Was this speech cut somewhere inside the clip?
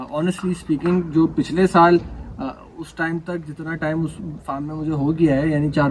no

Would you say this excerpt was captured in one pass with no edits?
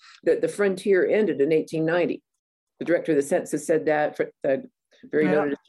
yes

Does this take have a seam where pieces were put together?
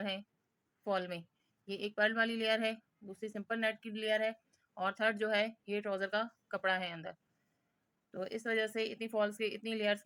no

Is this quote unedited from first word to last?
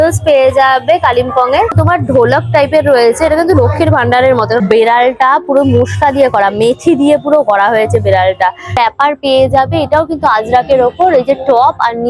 no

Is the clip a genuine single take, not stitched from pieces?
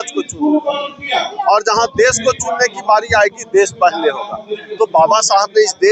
yes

